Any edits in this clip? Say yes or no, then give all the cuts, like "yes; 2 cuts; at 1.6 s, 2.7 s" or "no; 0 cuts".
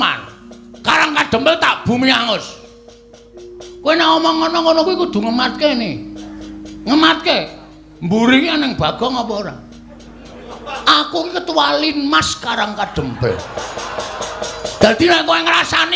no; 0 cuts